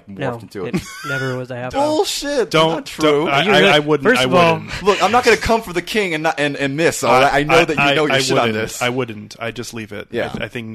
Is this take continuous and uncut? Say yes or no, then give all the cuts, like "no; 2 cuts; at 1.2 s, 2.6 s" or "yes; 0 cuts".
yes; 0 cuts